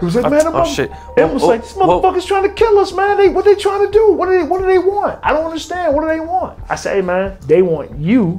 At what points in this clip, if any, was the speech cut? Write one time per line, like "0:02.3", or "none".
none